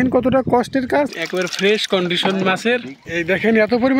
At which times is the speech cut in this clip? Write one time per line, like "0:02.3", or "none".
0:01.2
0:03.0